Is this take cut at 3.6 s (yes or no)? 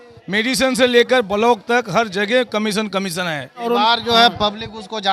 yes